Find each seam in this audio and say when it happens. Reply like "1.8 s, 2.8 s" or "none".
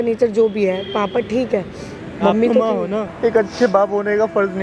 3.1 s